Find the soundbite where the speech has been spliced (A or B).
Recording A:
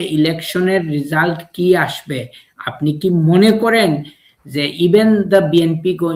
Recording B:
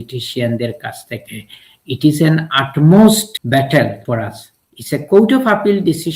B